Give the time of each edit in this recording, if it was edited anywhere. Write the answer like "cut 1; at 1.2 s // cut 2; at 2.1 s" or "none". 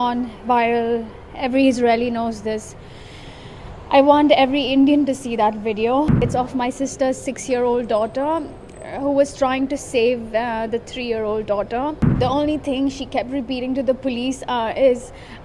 cut 1; at 6.2 s // cut 2; at 12.0 s